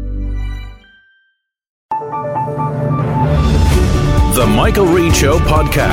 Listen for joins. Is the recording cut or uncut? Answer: cut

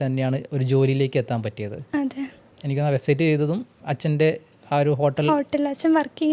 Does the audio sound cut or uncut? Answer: cut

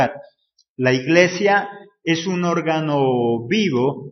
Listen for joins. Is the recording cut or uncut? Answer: uncut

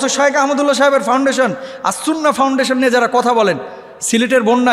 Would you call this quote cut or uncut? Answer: uncut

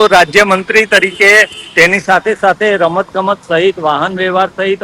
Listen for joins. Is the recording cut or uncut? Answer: uncut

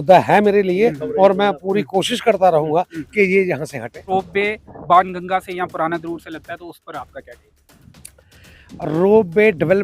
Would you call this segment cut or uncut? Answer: cut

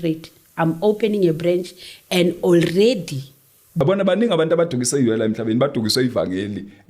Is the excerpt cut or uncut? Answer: cut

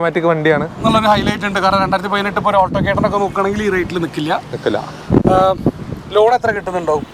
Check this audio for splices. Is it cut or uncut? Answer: uncut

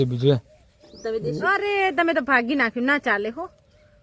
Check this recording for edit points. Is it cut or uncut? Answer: cut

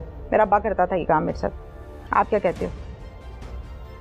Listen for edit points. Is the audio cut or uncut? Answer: uncut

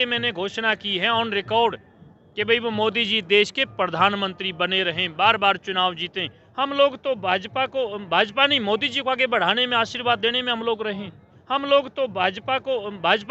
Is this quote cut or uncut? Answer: cut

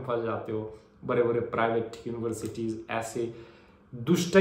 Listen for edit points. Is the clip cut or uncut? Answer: uncut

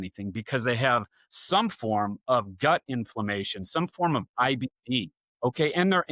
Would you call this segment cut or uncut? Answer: cut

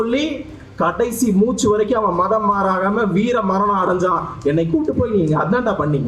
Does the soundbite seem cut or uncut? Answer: uncut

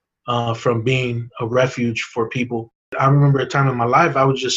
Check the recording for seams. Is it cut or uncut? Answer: cut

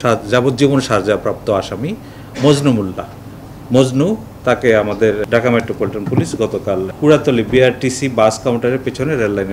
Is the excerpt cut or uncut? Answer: cut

